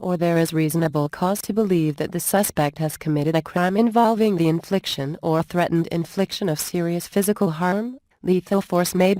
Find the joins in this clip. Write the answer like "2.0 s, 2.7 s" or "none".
3.4 s

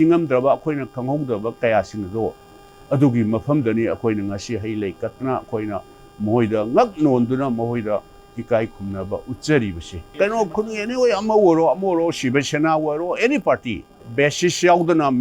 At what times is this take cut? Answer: 10.0 s

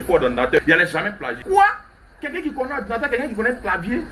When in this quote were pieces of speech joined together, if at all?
1.3 s

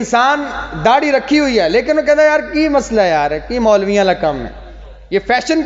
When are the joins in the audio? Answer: none

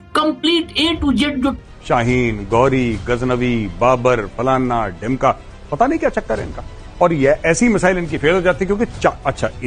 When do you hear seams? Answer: 1.7 s

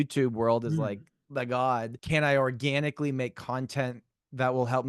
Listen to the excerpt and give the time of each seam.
2.0 s

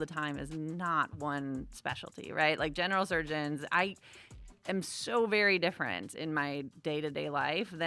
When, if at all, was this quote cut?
none

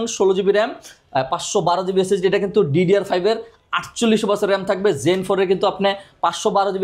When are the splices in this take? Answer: none

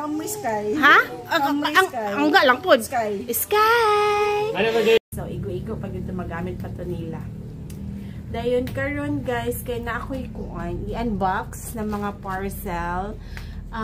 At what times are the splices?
5.0 s

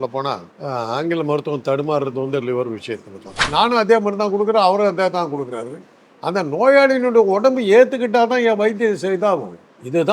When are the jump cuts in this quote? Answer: 3.5 s

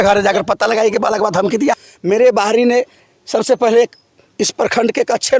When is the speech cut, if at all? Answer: 1.8 s

